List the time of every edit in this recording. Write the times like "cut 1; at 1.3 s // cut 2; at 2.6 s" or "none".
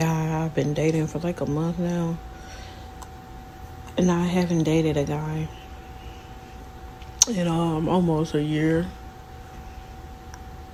none

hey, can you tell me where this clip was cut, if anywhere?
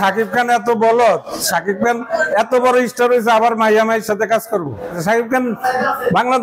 none

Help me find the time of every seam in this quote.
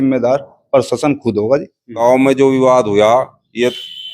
cut 1; at 2.0 s

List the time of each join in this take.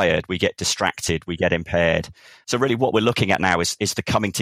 cut 1; at 2.4 s

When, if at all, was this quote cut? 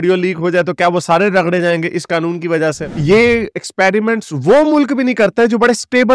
cut 1; at 2.9 s

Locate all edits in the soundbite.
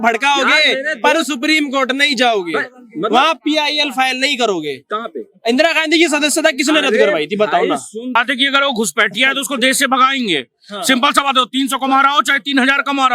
cut 1; at 8.2 s

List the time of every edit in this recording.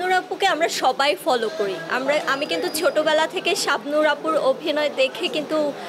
none

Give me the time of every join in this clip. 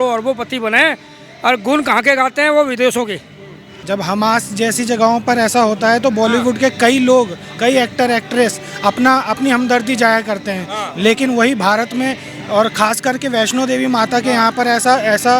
cut 1; at 3.9 s

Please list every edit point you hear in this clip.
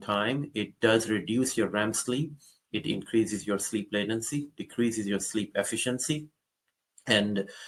none

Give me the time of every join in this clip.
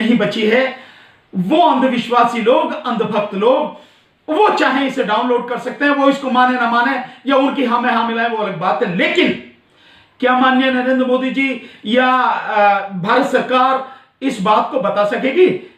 none

